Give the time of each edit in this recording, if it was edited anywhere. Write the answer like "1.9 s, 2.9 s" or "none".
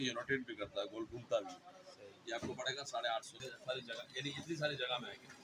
3.5 s